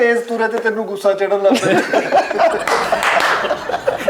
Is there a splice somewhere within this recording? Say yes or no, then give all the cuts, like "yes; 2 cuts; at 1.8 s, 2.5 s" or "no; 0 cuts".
no; 0 cuts